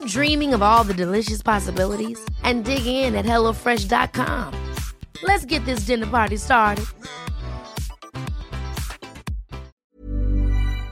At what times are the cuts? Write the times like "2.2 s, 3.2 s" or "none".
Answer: 9.7 s

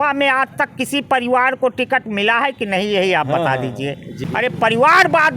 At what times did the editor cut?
4.2 s

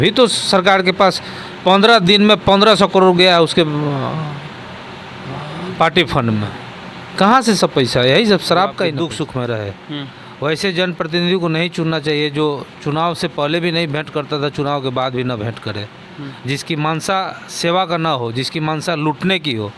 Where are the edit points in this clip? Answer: 8.9 s

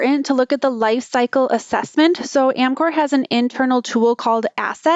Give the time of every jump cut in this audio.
none

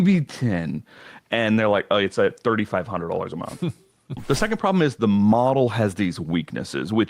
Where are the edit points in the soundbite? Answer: 4.2 s

